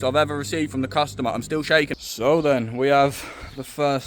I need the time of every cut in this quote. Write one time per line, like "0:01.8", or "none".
0:01.9